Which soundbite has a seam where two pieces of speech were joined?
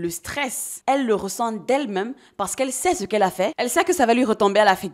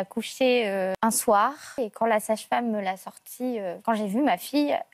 second; 3 cuts; at 0.9 s, 1.8 s, 3.8 s

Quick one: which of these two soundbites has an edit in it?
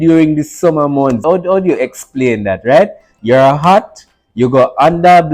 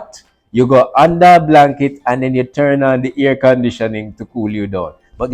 first; 1 cut; at 1.2 s

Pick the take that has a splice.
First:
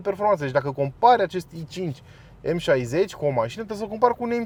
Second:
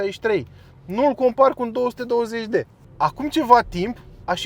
second; 1 cut; at 2.8 s

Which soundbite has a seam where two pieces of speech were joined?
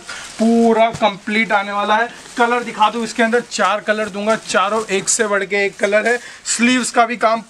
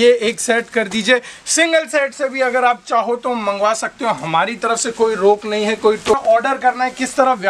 second; 1 cut; at 6.1 s

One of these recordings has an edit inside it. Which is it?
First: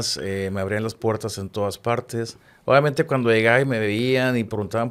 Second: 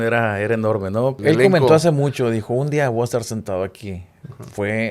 second; 1 cut; at 1.2 s

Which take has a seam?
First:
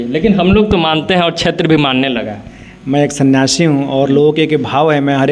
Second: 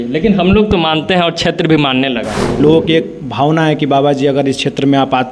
second; 1 cut; at 2.4 s

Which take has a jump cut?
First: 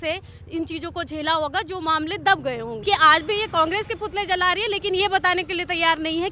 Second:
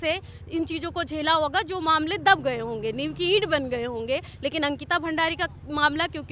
first; 1 cut; at 2.7 s

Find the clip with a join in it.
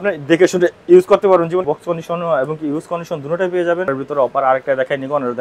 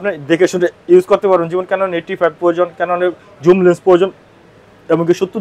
first; 2 cuts; at 1.7 s, 3.9 s

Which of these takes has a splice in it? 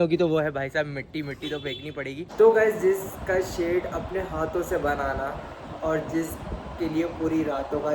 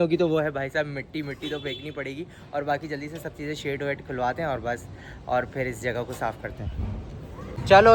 first; 1 cut; at 2.3 s

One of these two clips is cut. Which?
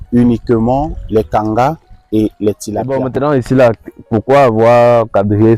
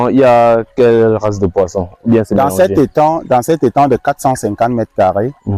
first; 1 cut; at 3.0 s

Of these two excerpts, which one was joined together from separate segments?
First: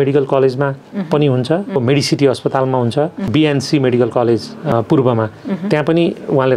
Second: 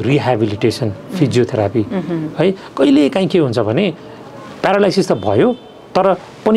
first; 3 cuts; at 1.8 s, 3.2 s, 4.7 s

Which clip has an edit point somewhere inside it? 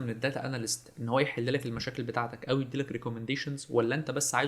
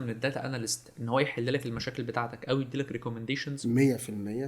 second; 1 cut; at 3.6 s

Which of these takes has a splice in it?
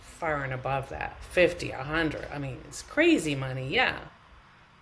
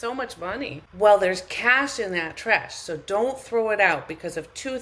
second; 1 cut; at 1.0 s

